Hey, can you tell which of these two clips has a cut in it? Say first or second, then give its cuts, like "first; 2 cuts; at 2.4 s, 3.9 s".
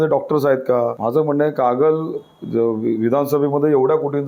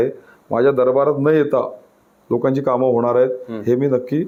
first; 1 cut; at 1.0 s